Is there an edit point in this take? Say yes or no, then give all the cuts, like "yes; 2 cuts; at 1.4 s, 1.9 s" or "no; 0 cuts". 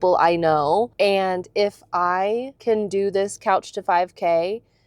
yes; 2 cuts; at 0.9 s, 2.5 s